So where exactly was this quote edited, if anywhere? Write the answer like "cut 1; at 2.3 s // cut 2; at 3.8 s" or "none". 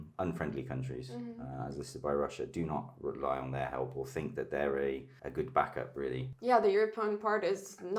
cut 1; at 5.1 s // cut 2; at 6.3 s